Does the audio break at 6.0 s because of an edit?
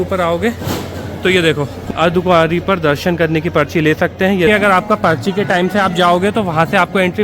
no; 2 cuts; at 1.8 s, 4.5 s

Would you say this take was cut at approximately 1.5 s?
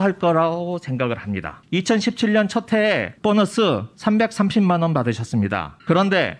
yes; 1 cut; at 1.5 s

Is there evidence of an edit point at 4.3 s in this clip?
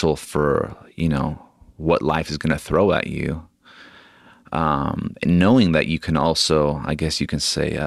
no; 0 cuts

